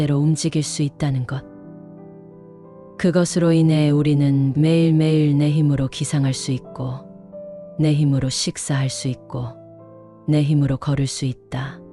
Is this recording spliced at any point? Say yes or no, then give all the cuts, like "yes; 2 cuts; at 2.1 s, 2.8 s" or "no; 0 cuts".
no; 0 cuts